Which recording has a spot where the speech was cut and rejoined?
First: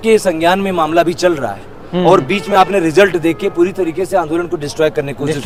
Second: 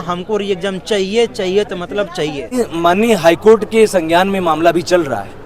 second; 1 cut; at 2.4 s

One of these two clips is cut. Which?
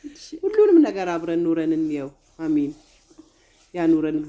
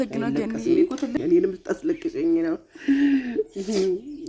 second; 1 cut; at 1.2 s

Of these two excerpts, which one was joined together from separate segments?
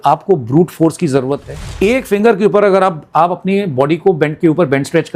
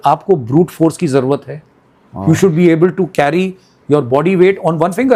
first; 1 cut; at 1.6 s

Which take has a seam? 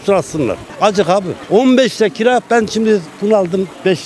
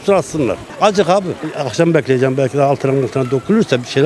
second; 1 cut; at 1.4 s

